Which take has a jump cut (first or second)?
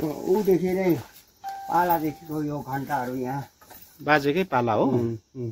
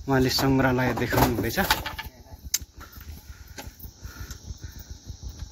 second